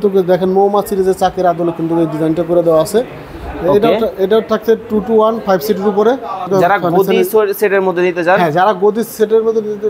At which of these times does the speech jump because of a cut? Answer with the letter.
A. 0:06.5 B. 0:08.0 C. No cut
A